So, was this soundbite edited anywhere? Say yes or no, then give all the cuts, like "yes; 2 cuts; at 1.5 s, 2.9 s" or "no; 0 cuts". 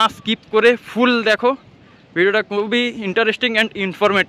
no; 0 cuts